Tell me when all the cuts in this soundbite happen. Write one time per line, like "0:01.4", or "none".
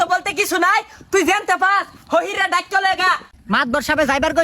0:03.4